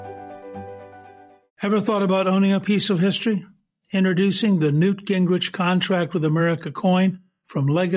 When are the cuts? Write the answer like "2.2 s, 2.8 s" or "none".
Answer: 1.4 s